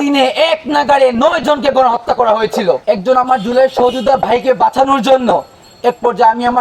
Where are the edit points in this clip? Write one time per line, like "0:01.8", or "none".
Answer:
0:02.8